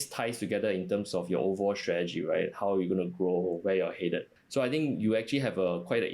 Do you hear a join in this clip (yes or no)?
yes